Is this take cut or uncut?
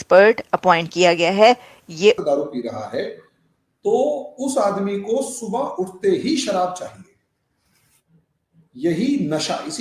cut